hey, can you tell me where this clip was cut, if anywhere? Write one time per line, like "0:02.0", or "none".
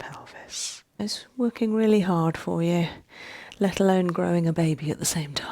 0:01.0